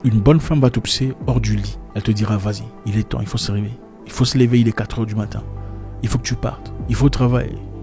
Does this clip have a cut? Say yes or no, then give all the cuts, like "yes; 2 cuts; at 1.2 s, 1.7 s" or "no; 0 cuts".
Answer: yes; 1 cut; at 0.9 s